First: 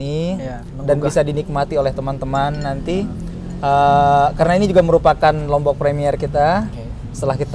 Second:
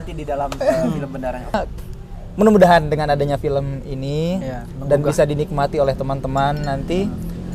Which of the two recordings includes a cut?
second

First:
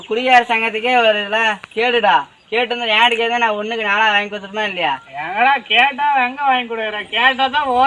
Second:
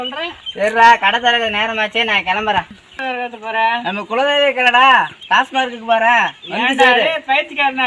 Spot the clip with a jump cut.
second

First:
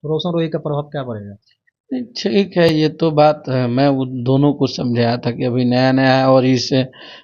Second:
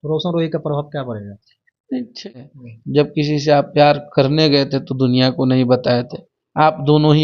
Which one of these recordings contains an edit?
second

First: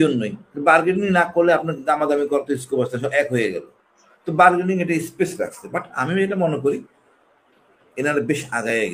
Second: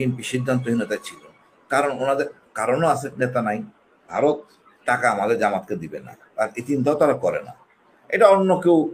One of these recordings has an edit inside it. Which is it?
second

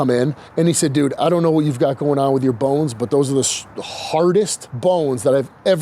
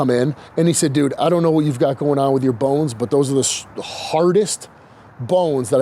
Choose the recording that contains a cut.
first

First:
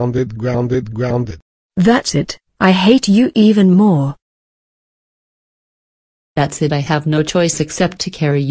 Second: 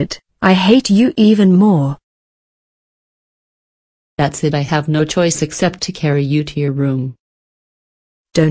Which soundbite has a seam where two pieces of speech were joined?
first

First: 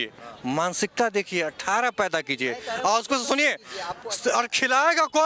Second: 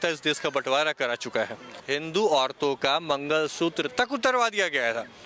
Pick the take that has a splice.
second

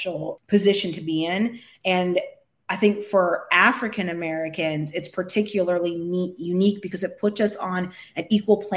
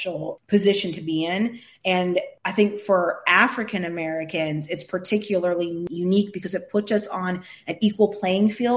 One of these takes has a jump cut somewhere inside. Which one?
second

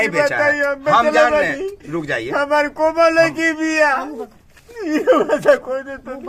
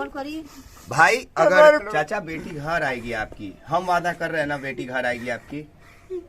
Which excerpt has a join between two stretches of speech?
second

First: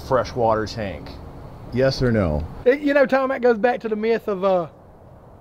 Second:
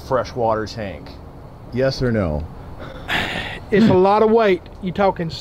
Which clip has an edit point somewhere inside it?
first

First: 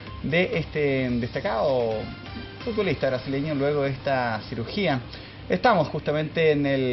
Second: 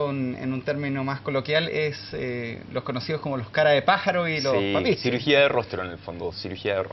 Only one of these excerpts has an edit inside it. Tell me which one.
first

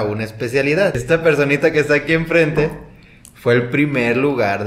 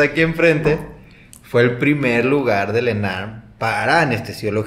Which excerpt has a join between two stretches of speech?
first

